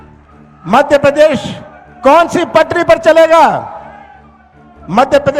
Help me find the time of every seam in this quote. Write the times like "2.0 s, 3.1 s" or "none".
none